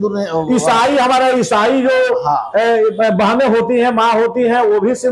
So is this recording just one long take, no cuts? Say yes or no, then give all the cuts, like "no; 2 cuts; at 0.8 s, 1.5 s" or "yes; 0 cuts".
yes; 0 cuts